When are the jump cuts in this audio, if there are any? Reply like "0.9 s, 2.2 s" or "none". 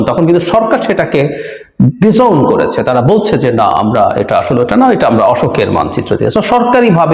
none